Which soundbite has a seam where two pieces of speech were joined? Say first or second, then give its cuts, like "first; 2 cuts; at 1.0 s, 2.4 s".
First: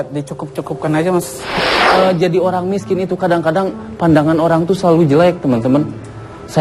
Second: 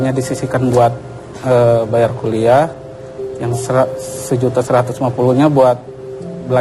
first; 1 cut; at 1.8 s